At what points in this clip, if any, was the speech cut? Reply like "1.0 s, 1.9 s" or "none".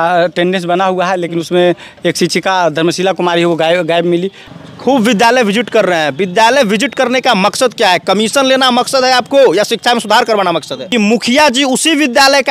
4.4 s, 10.8 s